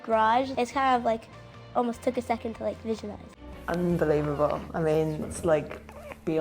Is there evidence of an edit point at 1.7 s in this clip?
no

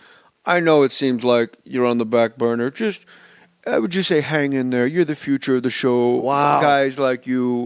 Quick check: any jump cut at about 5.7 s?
no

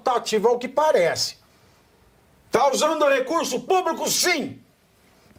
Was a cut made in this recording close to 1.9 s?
no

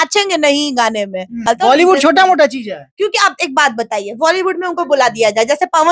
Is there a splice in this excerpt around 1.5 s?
yes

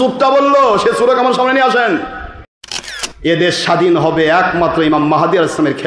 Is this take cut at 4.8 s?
no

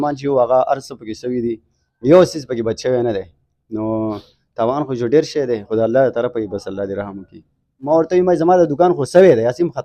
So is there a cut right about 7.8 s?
yes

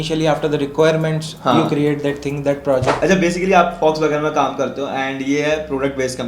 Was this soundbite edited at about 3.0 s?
yes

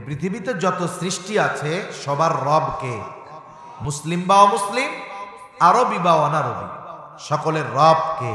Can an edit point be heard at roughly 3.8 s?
yes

